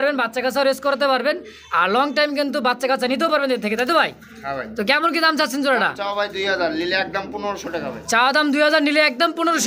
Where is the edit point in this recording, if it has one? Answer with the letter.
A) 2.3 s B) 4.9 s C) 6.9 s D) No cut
D